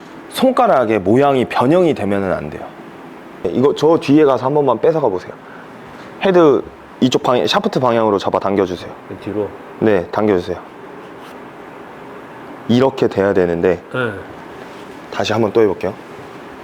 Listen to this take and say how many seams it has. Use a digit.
1